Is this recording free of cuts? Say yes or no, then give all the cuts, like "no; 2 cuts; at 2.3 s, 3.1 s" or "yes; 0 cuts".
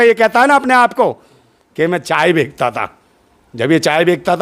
yes; 0 cuts